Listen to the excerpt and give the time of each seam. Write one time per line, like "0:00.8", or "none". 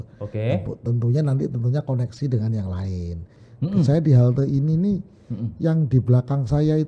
0:03.4